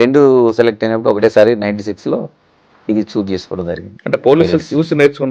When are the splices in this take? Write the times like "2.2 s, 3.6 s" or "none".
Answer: 3.9 s